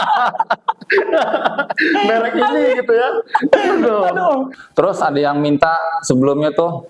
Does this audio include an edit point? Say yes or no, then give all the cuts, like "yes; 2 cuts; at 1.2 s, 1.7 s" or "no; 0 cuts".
yes; 1 cut; at 4.5 s